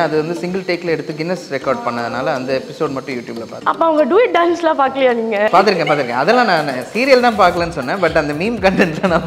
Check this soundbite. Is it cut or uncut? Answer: uncut